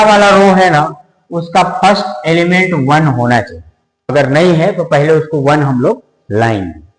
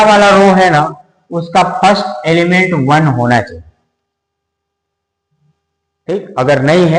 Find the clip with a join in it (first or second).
first